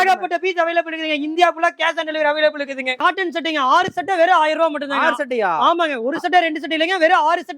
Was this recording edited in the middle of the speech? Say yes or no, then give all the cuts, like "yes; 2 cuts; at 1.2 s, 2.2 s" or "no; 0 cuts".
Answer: yes; 1 cut; at 3.0 s